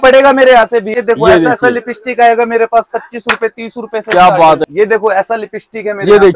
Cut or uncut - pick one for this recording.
cut